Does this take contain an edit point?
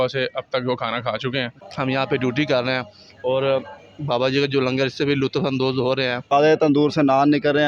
yes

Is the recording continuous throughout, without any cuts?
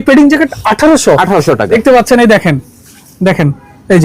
no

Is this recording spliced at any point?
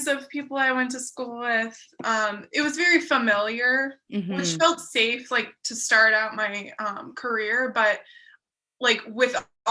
no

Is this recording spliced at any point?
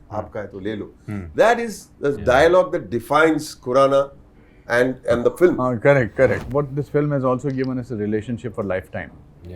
yes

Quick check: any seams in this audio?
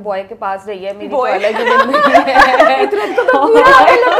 no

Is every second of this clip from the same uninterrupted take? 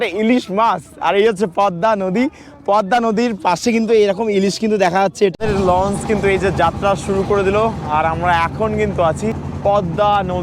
no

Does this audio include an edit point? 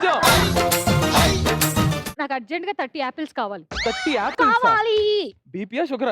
yes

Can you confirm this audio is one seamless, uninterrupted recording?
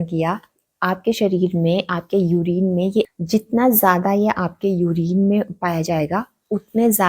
no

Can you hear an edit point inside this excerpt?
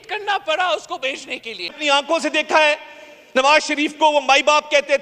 yes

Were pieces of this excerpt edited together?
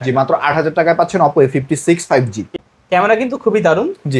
no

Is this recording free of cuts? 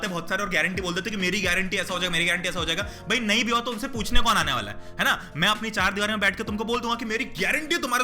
yes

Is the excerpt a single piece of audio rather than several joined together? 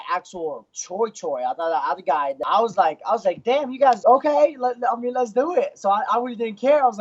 no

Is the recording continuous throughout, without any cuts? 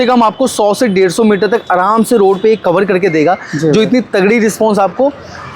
yes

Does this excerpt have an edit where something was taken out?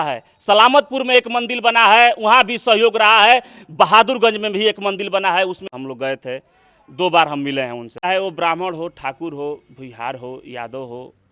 yes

